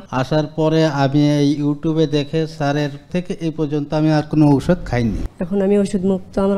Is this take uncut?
no; 2 cuts; at 3.1 s, 5.3 s

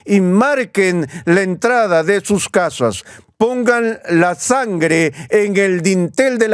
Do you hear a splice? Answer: no; 0 cuts

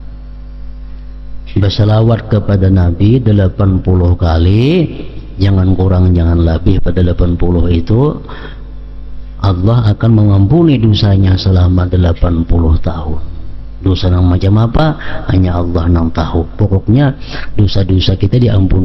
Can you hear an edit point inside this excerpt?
no; 0 cuts

